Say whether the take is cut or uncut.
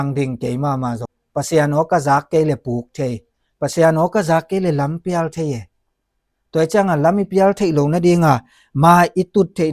cut